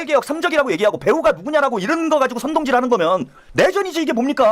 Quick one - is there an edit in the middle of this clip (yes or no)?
yes